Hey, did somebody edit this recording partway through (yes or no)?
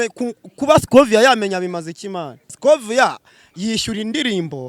yes